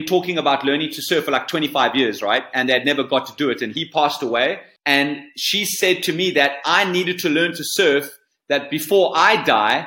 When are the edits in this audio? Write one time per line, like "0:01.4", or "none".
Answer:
0:04.7